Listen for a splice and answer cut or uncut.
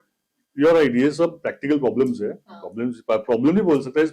uncut